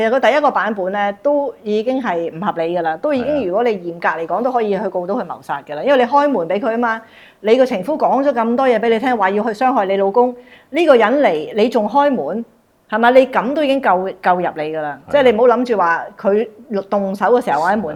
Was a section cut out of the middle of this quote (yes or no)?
no